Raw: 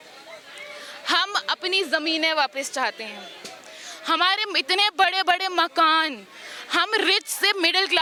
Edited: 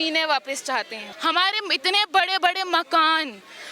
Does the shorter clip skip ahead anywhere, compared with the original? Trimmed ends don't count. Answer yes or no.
yes